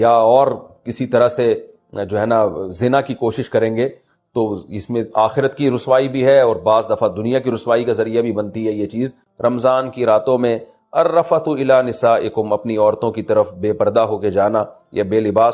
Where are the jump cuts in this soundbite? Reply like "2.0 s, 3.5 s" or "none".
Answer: 9.2 s